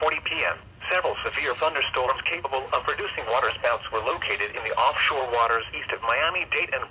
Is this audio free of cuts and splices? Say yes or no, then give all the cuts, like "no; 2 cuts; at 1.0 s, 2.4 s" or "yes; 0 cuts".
yes; 0 cuts